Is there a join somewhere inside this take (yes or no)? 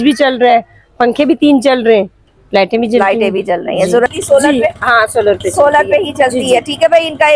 yes